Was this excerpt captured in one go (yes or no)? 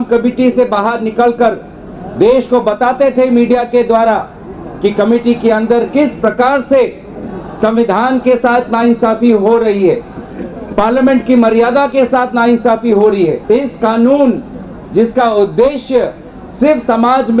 no